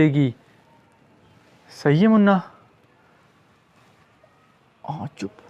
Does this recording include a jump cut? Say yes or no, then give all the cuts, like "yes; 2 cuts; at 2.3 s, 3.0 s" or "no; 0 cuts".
no; 0 cuts